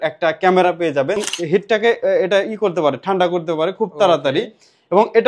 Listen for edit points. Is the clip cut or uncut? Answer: cut